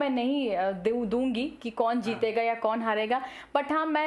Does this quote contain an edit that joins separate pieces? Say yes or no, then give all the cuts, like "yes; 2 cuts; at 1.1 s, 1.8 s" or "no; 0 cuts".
no; 0 cuts